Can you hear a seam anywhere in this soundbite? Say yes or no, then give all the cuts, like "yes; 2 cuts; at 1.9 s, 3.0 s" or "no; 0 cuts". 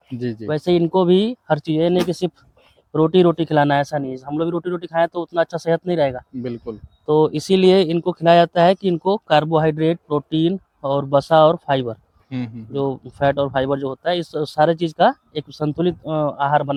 no; 0 cuts